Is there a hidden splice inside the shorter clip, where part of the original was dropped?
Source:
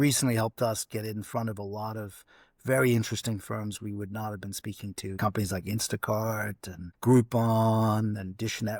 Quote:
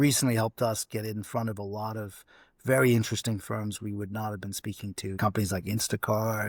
no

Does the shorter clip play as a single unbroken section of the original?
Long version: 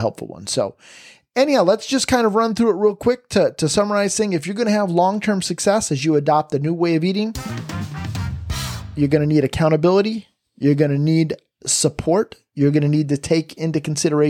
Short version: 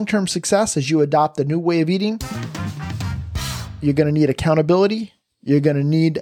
yes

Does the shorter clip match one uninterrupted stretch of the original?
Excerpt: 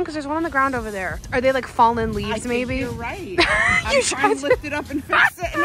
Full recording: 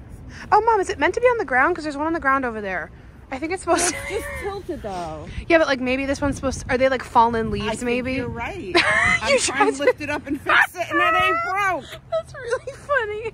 no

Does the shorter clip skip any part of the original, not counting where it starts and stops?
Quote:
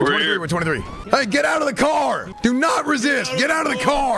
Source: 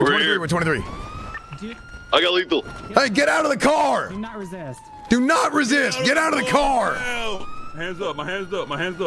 yes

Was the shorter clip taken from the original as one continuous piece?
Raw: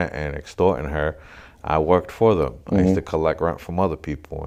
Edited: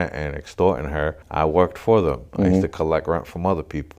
no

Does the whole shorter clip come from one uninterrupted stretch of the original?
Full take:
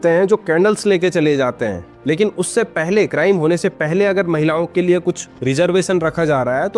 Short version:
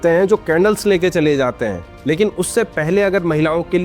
no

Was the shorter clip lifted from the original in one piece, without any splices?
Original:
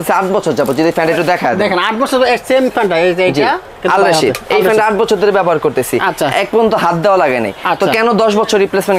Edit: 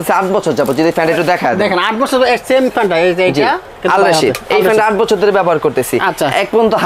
yes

